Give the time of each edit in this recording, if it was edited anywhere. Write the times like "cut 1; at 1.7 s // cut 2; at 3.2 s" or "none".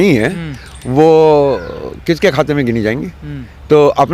none